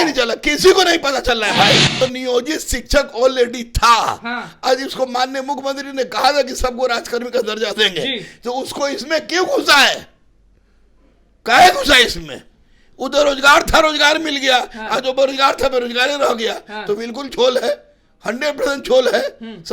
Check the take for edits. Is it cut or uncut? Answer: cut